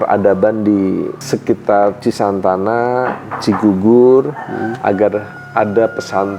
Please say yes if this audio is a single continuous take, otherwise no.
no